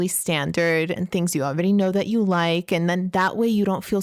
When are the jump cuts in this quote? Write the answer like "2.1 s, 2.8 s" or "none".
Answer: none